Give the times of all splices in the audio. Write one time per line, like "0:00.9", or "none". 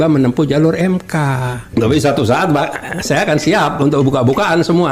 0:01.7

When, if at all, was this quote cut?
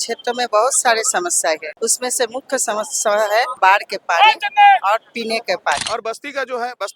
0:01.7
0:03.5
0:05.8

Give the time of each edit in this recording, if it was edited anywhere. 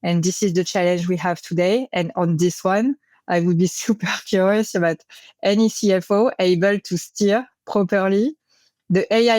none

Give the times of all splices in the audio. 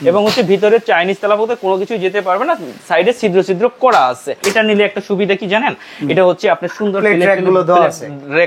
0:04.4

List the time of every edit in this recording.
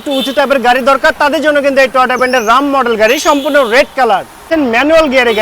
0:04.5

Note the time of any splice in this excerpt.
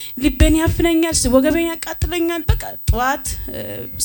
0:02.5

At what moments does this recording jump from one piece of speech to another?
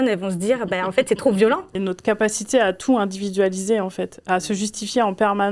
0:01.7

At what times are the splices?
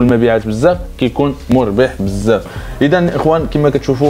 0:02.5

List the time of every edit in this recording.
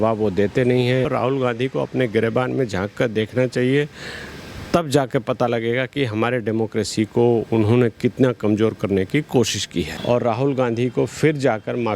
0:01.1
0:09.9

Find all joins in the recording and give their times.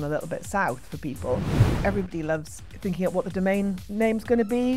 0:01.8

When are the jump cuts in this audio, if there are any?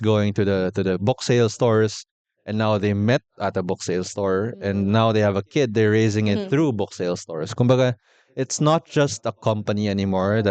none

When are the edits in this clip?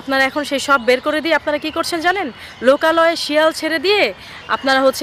none

